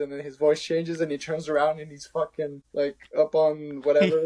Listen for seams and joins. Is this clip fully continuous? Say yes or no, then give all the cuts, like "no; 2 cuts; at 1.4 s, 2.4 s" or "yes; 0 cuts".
no; 1 cut; at 2.6 s